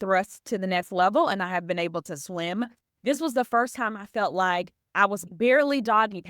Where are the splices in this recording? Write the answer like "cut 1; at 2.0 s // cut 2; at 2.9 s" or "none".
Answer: cut 1; at 5.3 s